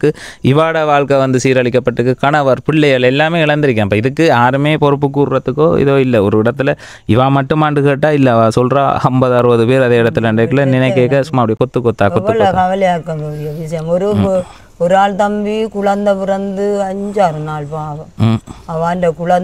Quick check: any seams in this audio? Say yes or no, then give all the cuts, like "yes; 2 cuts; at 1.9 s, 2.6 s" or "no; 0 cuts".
no; 0 cuts